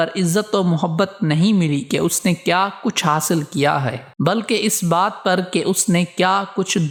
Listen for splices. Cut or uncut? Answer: uncut